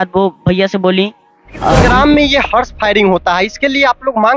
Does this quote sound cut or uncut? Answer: cut